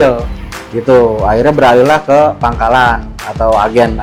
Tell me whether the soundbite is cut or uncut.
uncut